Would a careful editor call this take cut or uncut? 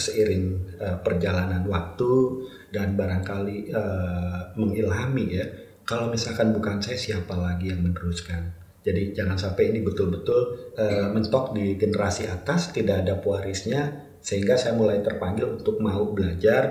uncut